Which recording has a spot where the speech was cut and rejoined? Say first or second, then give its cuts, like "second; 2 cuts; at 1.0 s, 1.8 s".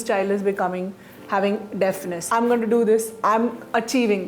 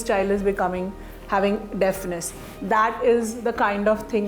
first; 1 cut; at 2.1 s